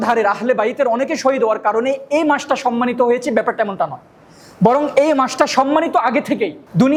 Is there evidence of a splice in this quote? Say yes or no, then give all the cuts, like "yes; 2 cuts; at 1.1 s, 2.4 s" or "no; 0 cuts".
no; 0 cuts